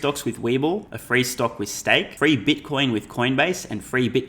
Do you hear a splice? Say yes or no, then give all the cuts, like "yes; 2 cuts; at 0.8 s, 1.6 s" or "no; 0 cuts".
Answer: yes; 2 cuts; at 0.9 s, 2.1 s